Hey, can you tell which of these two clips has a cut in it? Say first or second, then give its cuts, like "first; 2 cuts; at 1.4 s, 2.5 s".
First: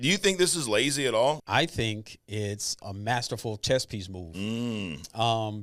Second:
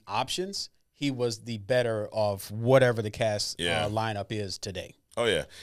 first; 2 cuts; at 1.4 s, 2.8 s